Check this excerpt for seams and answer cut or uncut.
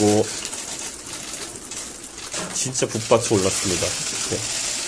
uncut